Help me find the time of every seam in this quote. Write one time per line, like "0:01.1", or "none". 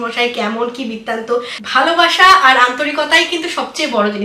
0:01.6